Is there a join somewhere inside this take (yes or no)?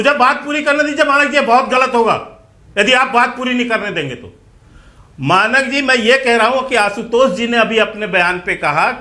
no